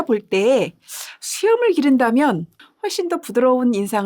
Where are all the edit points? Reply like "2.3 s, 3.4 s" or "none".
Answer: 2.6 s